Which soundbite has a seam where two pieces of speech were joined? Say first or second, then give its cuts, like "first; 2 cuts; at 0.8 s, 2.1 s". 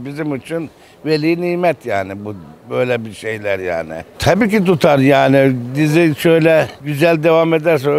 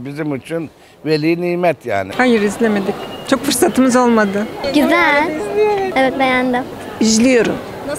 second; 3 cuts; at 2.1 s, 4.6 s, 6.8 s